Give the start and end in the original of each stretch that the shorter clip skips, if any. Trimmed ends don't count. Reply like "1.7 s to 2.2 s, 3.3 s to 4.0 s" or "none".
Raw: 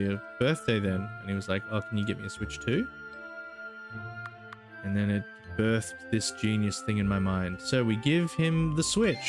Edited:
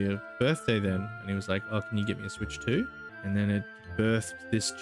3.1 s to 4.7 s